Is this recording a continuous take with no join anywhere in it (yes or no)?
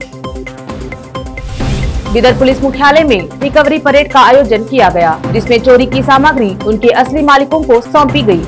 yes